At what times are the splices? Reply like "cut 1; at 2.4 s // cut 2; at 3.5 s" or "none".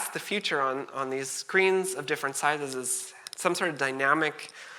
none